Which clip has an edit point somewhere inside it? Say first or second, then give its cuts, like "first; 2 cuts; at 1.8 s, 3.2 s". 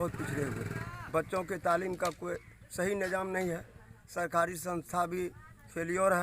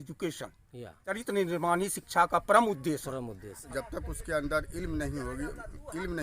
second; 2 cuts; at 1.1 s, 3.6 s